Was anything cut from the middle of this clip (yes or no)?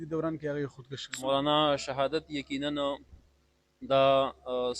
yes